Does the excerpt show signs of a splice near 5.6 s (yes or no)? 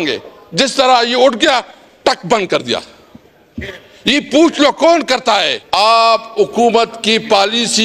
yes